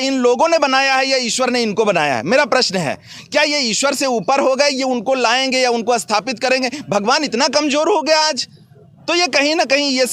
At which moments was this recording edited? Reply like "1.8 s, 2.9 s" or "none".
none

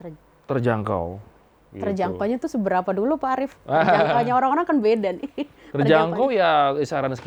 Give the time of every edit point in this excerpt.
none

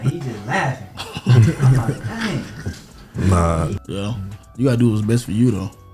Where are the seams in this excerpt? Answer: 3.8 s

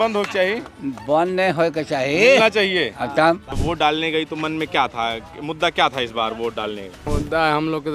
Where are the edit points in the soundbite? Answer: 3.5 s, 7.1 s

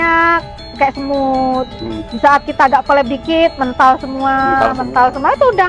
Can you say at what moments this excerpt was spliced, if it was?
none

